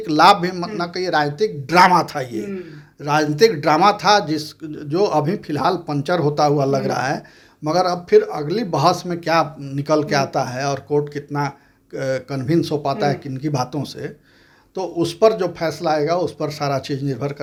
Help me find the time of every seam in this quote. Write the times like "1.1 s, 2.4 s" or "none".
none